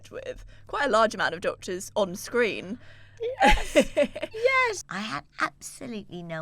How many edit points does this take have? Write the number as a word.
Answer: one